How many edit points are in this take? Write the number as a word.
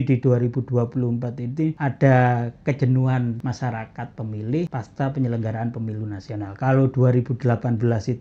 three